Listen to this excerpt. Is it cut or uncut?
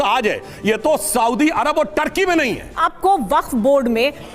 cut